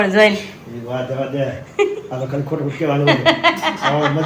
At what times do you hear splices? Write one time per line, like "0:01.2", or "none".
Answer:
none